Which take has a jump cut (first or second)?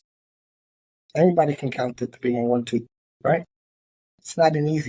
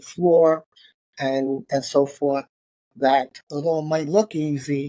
second